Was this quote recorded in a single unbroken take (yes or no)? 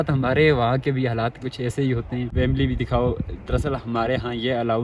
no